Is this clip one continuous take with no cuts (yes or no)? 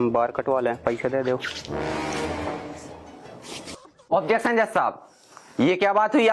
no